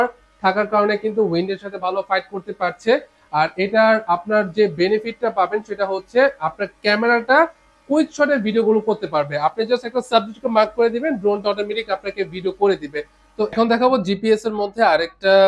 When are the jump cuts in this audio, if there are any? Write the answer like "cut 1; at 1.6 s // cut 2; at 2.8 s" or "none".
cut 1; at 13.5 s